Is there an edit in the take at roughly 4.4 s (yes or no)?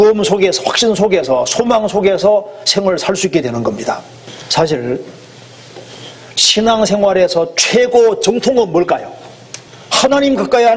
no